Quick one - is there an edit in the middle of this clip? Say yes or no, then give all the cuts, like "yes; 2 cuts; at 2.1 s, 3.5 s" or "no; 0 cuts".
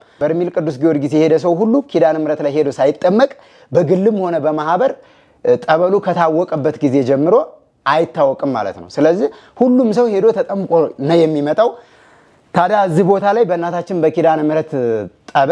no; 0 cuts